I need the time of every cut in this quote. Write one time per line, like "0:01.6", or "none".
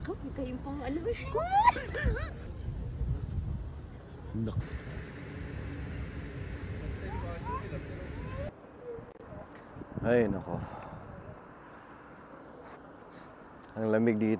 0:02.5
0:04.6
0:08.5